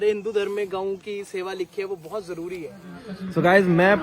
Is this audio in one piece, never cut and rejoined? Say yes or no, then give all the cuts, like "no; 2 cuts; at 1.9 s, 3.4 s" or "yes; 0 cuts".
no; 1 cut; at 2.9 s